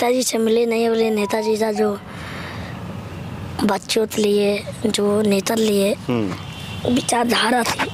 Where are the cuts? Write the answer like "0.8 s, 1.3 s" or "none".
none